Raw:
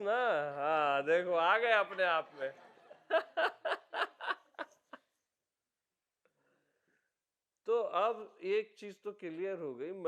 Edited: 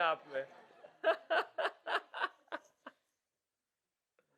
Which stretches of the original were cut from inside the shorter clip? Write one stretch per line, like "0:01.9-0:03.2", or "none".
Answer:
none